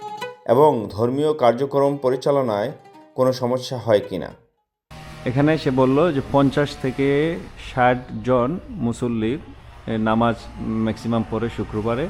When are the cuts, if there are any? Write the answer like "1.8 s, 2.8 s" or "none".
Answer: 4.3 s

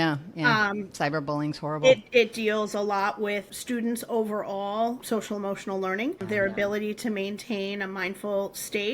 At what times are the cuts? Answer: 3.5 s, 5.0 s, 6.2 s

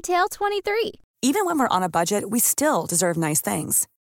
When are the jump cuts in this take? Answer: none

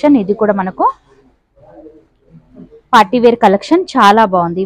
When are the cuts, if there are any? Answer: none

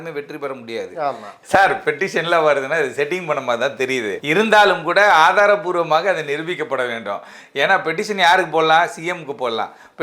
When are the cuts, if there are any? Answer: 1.3 s, 4.2 s

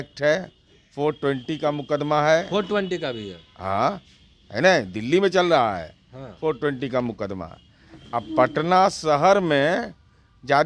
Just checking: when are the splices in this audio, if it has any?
none

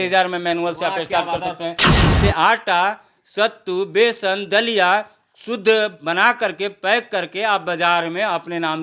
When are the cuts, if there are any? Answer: 1.9 s

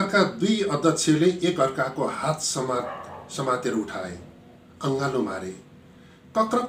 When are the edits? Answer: none

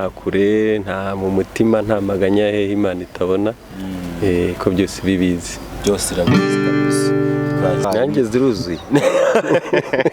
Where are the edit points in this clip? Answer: 7.8 s

